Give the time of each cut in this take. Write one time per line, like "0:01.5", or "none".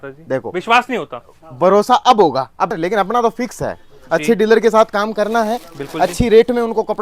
0:02.7